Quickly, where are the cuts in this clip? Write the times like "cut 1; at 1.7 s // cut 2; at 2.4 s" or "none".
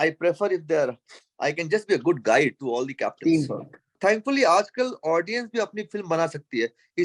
cut 1; at 3.9 s